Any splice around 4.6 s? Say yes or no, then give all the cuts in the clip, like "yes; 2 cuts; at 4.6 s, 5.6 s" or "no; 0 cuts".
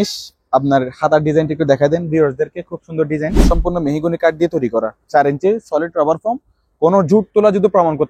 no; 1 cut; at 3.4 s